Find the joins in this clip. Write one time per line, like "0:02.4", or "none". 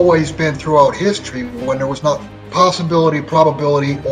0:02.4